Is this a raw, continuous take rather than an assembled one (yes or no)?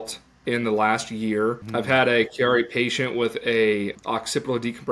no